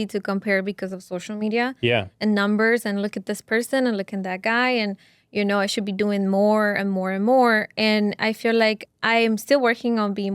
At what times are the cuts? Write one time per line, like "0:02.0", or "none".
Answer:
none

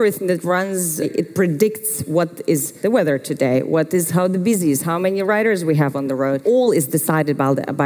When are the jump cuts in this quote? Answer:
0:01.1
0:02.7
0:06.4

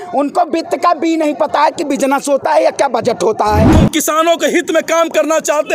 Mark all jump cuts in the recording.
0:03.7

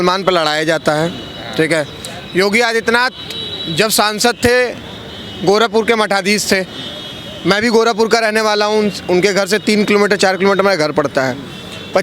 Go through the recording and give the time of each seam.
none

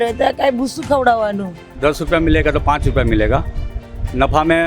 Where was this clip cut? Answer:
0:01.8

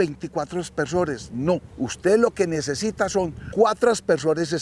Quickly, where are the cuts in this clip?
0:01.7
0:03.4

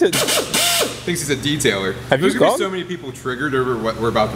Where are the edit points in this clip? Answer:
none

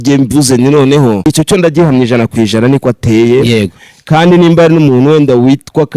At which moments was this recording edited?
0:01.2

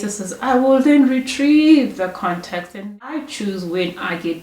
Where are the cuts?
0:02.8

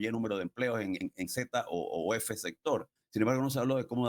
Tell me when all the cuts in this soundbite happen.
0:01.0
0:03.0

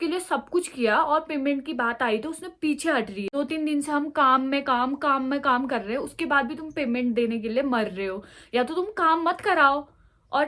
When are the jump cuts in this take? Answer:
none

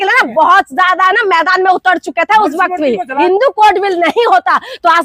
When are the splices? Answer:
0:03.2

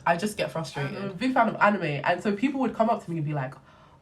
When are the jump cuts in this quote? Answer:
0:01.0

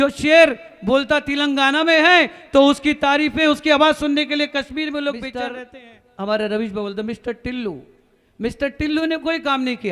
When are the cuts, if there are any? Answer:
0:05.6

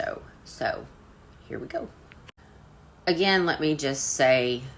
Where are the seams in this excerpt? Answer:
0:02.4

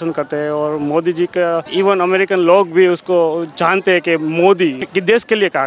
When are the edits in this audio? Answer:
0:01.7
0:04.8

